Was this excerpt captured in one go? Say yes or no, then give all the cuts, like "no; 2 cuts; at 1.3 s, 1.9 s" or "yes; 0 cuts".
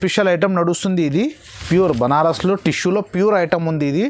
no; 1 cut; at 1.6 s